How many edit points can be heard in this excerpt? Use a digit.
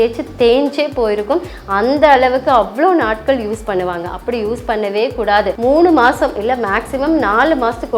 1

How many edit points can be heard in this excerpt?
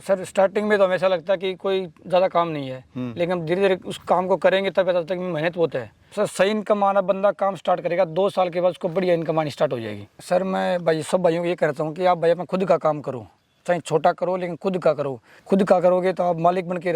3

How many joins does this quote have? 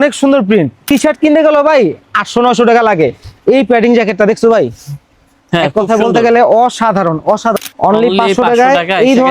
2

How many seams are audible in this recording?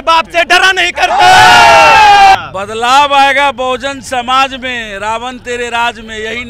1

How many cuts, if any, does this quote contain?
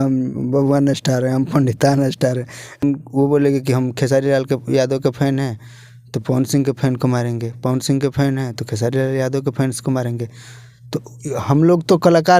1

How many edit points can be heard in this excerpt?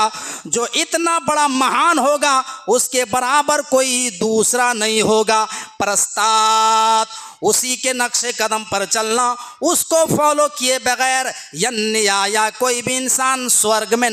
0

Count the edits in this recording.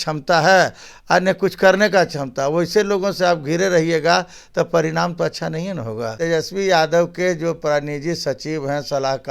1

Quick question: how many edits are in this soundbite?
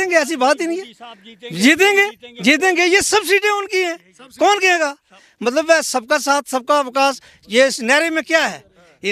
0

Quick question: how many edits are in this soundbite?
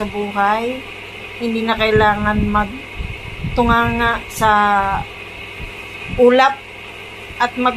1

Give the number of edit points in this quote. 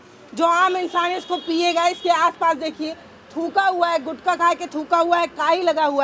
0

